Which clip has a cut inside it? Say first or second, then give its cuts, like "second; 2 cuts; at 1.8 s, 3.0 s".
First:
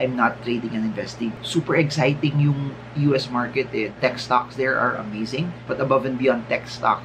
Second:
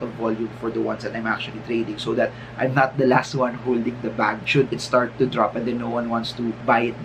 first; 1 cut; at 1.3 s